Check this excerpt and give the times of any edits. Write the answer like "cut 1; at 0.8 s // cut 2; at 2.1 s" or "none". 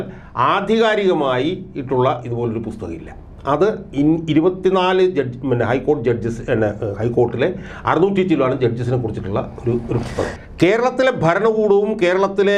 cut 1; at 10.4 s